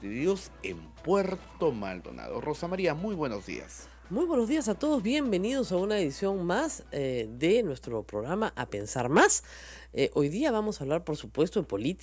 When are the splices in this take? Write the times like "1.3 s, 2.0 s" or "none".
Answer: none